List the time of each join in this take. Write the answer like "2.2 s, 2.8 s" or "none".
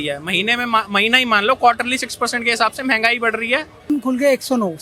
3.9 s